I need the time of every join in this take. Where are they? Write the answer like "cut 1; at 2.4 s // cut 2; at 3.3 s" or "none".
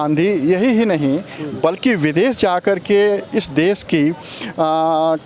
none